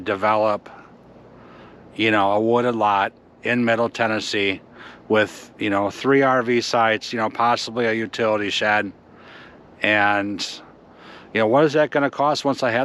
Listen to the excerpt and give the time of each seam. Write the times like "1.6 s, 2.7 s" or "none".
none